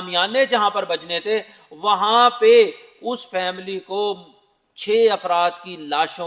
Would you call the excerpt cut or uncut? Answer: uncut